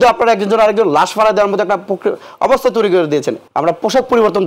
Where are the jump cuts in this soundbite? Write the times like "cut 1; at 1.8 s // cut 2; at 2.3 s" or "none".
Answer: cut 1; at 3.4 s